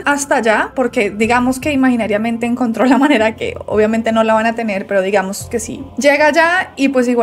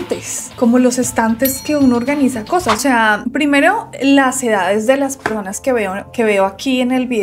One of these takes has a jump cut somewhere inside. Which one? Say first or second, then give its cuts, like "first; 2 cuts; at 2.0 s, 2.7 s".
second; 1 cut; at 2.8 s